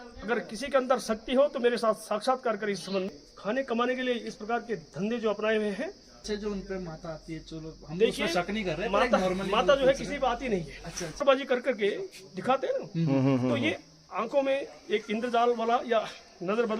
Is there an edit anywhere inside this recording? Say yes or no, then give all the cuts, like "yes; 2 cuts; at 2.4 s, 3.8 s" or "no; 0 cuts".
yes; 3 cuts; at 3.1 s, 6.2 s, 11.2 s